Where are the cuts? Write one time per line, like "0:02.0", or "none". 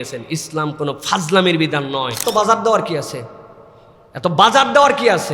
0:02.2